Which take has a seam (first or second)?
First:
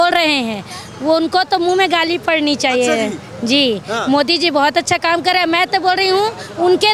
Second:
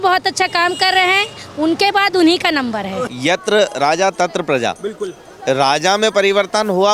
second